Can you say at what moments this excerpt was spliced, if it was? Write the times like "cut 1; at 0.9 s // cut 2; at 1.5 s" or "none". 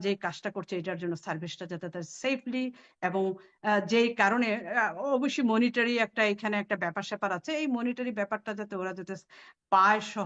none